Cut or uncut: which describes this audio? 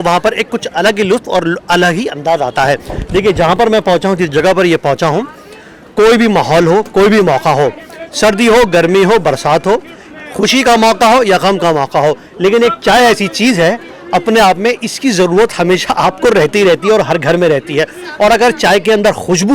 uncut